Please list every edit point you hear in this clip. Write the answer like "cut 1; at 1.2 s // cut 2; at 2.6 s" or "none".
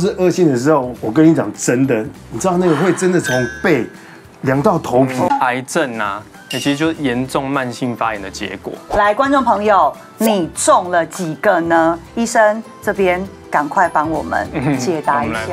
cut 1; at 5.3 s // cut 2; at 8.7 s